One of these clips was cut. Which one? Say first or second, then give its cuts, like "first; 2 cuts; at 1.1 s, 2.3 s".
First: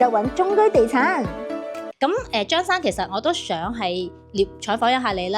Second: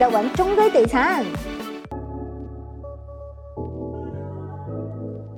first; 1 cut; at 1.8 s